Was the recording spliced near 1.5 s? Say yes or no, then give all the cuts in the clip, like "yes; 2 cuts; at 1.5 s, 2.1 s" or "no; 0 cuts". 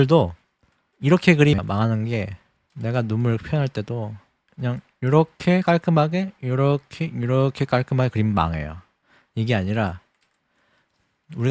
yes; 1 cut; at 1.5 s